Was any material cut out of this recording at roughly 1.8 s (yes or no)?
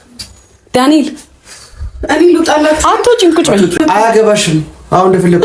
no